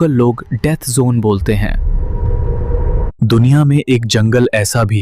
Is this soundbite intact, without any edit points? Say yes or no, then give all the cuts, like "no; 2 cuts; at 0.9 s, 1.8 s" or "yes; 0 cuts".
no; 1 cut; at 3.0 s